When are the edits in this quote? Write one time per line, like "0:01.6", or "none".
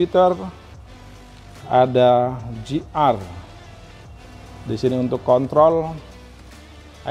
none